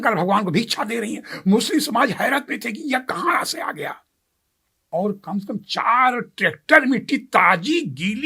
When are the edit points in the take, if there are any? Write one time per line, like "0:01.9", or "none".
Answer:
0:04.8